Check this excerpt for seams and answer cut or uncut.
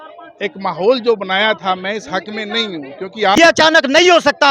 cut